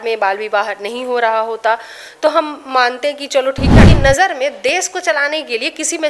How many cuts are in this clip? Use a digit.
1